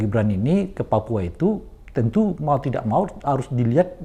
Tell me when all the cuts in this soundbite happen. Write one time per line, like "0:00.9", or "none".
none